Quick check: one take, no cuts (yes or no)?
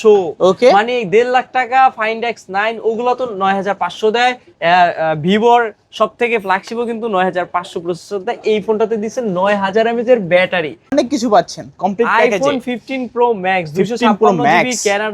no